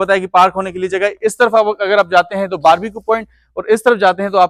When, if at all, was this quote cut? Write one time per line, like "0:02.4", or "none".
none